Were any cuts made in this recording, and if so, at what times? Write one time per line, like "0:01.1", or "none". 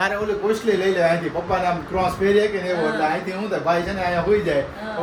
none